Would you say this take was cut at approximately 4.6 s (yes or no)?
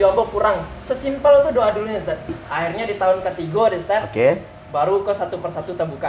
no